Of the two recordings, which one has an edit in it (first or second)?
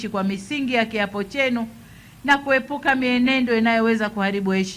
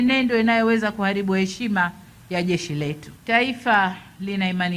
second